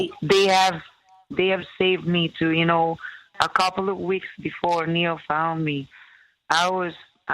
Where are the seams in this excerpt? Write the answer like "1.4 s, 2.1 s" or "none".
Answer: 3.3 s